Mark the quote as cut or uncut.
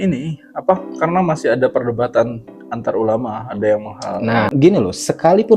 cut